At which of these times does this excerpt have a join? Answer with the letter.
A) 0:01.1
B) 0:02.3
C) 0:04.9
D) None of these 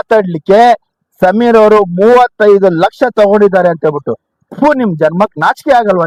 D